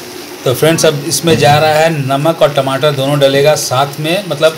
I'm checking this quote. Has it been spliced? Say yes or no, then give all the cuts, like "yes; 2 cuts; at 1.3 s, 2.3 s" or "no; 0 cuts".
no; 0 cuts